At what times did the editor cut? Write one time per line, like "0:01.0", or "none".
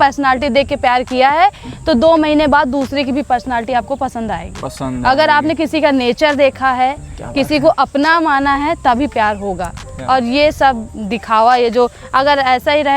none